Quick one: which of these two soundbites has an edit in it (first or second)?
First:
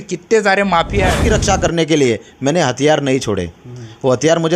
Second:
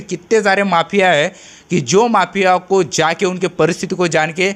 first